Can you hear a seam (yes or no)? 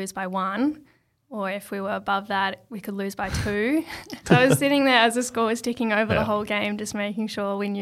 yes